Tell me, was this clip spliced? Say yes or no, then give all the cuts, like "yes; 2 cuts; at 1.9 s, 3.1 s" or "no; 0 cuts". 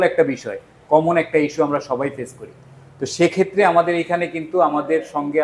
no; 0 cuts